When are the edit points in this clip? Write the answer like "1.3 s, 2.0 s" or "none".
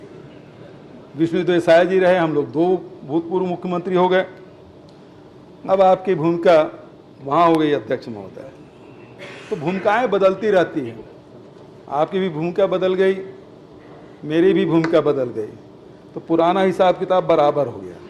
none